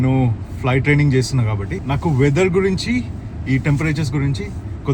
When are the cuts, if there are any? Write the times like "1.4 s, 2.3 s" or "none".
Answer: none